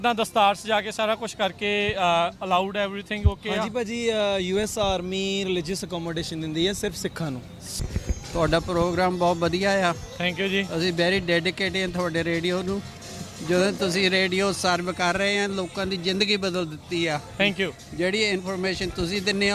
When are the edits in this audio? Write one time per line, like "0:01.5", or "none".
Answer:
0:07.8